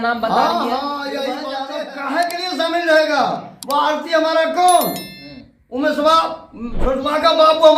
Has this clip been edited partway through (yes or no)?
yes